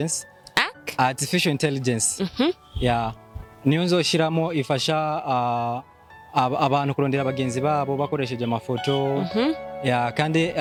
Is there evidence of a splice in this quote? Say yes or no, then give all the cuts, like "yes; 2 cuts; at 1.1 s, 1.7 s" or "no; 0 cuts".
no; 0 cuts